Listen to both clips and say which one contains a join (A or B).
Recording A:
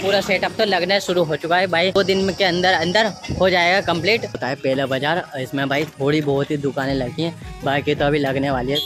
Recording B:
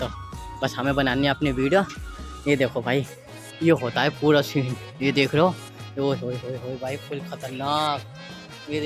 A